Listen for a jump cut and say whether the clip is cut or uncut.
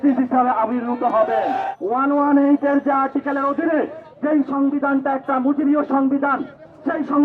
cut